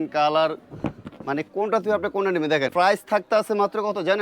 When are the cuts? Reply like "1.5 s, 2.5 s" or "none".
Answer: 2.7 s